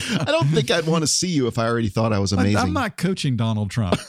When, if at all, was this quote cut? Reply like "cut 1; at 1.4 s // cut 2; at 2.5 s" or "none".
none